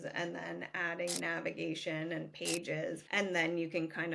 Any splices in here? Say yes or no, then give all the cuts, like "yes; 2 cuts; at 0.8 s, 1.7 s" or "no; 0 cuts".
yes; 1 cut; at 3.0 s